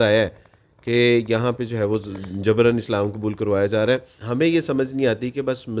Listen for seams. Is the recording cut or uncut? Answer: cut